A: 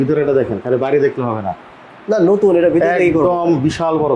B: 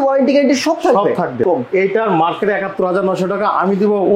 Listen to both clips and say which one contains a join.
B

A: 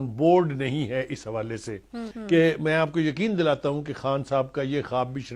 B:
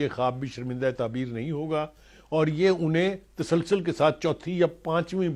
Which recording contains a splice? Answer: A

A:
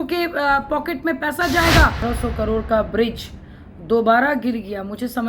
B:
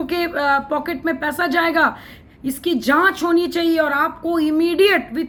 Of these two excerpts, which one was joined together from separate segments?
A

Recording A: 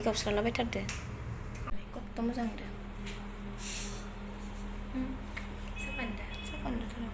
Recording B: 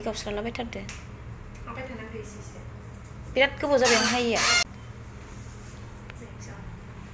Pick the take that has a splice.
A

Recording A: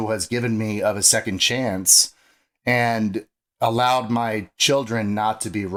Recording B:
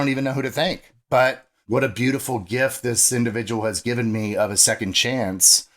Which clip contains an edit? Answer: B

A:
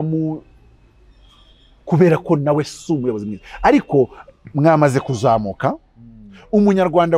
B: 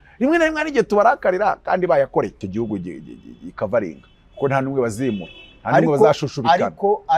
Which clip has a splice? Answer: B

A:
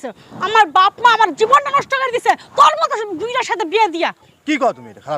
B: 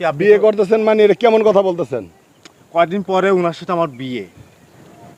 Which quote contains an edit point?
A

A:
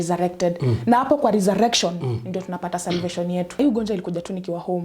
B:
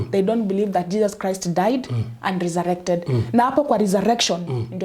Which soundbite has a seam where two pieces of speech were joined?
A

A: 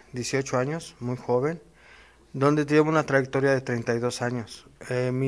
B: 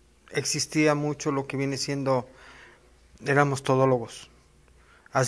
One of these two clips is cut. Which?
A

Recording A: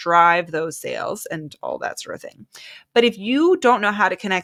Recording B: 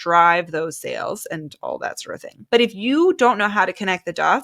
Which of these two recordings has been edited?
B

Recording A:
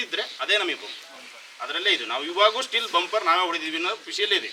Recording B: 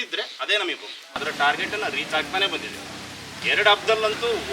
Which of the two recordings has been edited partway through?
B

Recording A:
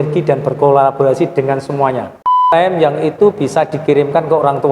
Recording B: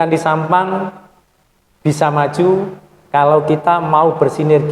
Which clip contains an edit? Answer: A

